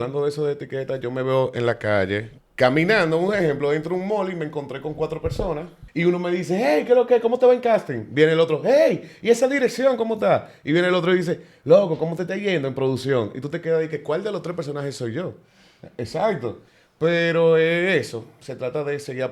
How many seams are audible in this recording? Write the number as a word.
two